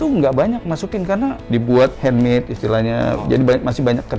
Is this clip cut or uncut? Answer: cut